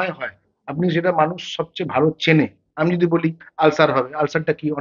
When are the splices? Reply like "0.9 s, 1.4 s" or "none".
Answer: none